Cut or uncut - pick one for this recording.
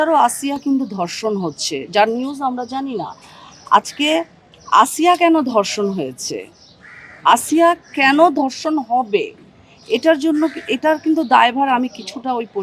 uncut